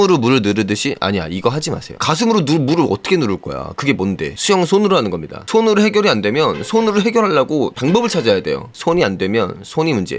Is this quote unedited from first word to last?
no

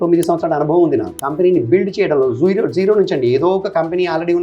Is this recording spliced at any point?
yes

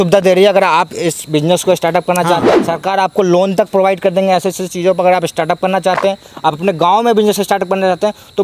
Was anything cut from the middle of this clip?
yes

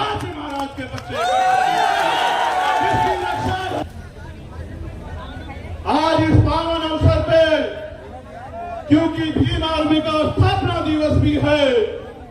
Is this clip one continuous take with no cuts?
no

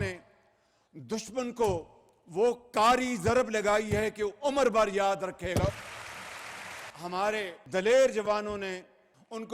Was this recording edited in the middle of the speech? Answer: yes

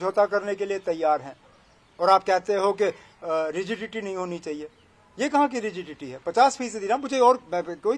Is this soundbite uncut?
yes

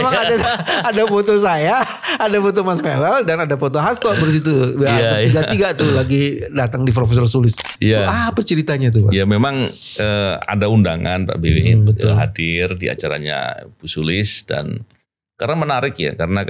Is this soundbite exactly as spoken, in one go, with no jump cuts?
yes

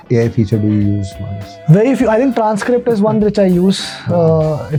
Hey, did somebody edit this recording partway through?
no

